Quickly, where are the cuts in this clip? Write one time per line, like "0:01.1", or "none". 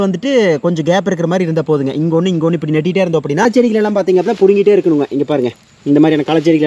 0:03.4